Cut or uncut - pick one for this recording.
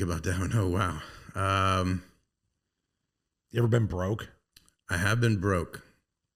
uncut